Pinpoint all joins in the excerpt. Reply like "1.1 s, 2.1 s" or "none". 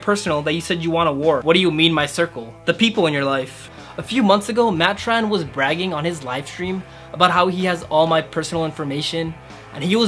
1.4 s, 3.7 s

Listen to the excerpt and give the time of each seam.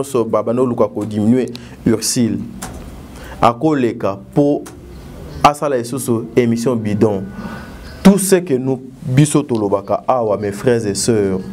none

